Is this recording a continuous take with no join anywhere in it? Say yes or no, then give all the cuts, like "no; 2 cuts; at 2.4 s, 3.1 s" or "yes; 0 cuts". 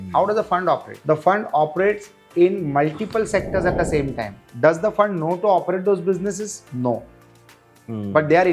no; 1 cut; at 0.9 s